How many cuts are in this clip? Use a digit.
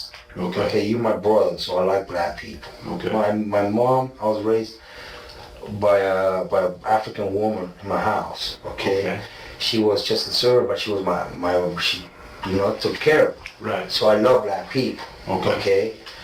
0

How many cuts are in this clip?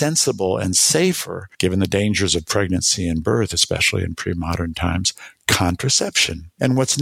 0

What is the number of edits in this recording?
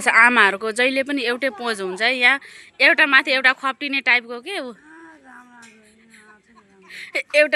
0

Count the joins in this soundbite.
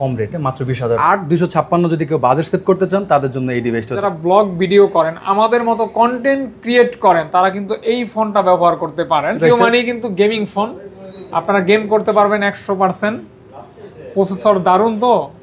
3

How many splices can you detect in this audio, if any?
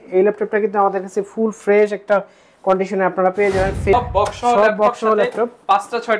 1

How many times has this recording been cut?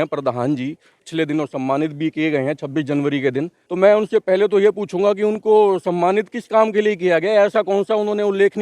2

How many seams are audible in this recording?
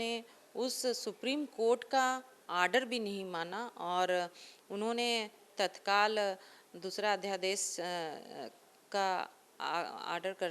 0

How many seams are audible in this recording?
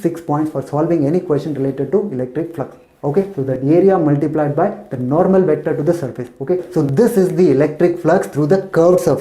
2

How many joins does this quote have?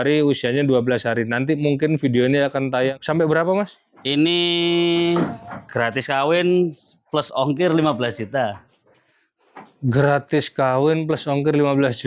1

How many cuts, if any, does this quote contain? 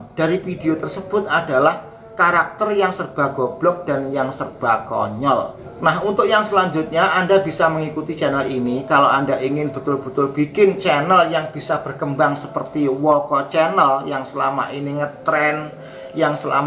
0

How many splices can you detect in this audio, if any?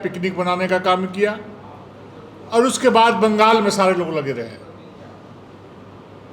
0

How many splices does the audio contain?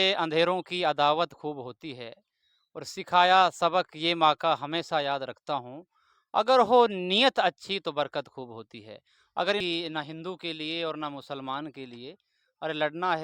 1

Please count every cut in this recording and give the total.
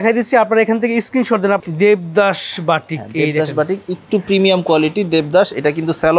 1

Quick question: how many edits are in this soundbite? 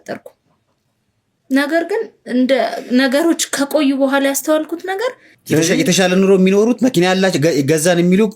1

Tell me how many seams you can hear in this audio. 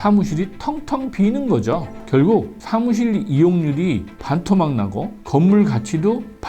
1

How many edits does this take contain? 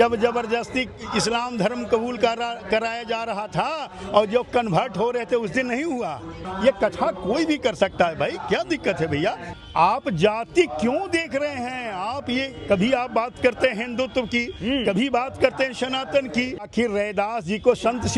3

